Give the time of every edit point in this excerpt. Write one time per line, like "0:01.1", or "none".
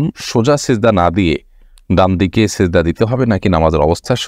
none